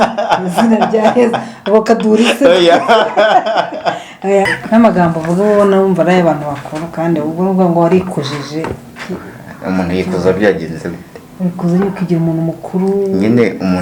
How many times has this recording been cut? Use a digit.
1